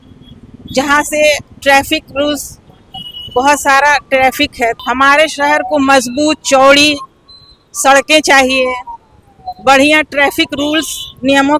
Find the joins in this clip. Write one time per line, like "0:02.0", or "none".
0:04.7